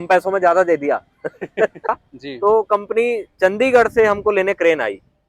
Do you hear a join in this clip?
yes; 1 cut; at 1.9 s

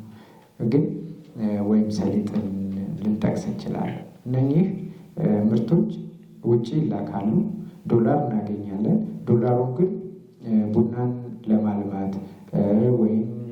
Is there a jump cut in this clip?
no; 0 cuts

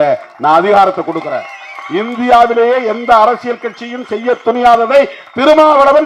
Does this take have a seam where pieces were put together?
no; 0 cuts

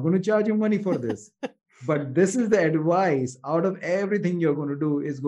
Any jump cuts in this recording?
no; 0 cuts

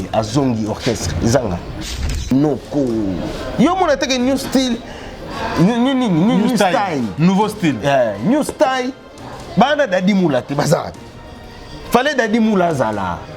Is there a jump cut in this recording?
yes; 1 cut; at 2.1 s

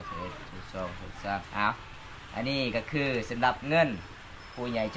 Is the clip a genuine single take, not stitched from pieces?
no; 1 cut; at 1.5 s

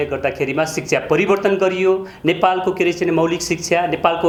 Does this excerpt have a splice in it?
no; 0 cuts

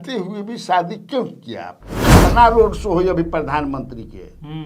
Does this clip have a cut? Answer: yes; 1 cut; at 2.2 s

